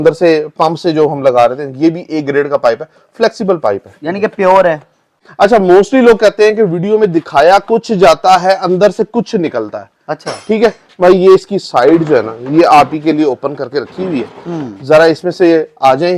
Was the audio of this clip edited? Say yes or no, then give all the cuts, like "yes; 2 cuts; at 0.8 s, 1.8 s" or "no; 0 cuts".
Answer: yes; 1 cut; at 5.2 s